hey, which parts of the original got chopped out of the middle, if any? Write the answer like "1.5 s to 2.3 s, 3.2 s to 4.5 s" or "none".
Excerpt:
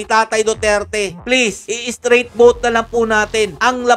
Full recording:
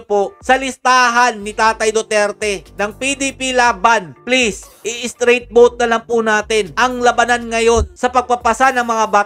2.8 s to 4.5 s